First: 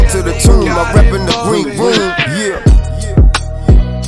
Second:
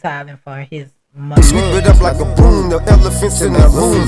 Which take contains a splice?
second; 1 cut; at 1.2 s

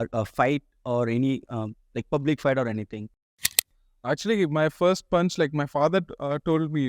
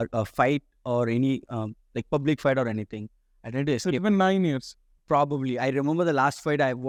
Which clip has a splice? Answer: first; 1 cut; at 3.6 s

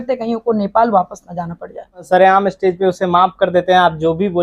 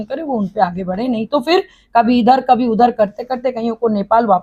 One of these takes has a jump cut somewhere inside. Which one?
first; 1 cut; at 2.0 s

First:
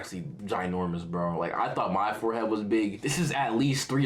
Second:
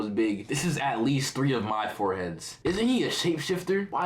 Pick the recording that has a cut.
second; 1 cut; at 2.5 s

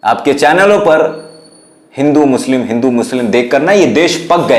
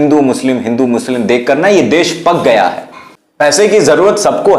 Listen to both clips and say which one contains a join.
second; 1 cut; at 3.6 s

